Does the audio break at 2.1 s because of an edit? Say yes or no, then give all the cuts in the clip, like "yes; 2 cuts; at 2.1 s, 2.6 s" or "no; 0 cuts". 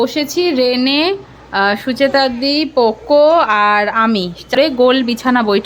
no; 1 cut; at 4.7 s